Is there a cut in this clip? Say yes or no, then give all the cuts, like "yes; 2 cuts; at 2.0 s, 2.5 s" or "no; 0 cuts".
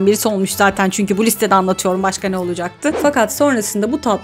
yes; 1 cut; at 3.0 s